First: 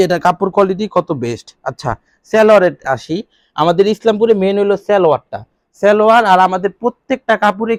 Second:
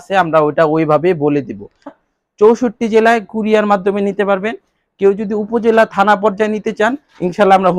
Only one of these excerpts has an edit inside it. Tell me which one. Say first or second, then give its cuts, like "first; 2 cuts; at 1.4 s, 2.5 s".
second; 1 cut; at 2.0 s